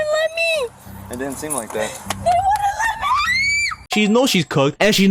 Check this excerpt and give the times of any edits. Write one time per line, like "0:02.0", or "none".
none